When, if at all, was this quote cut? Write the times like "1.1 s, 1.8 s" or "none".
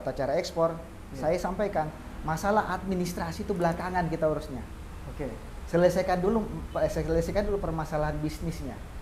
none